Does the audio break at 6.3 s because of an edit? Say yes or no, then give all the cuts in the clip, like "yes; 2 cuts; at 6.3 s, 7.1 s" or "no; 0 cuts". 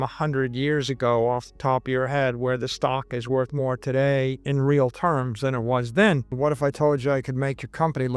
yes; 2 cuts; at 4.4 s, 6.3 s